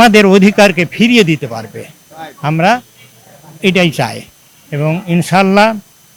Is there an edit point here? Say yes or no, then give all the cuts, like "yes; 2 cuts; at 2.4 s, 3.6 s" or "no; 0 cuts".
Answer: no; 0 cuts